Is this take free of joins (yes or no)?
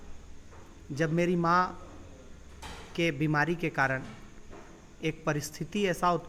yes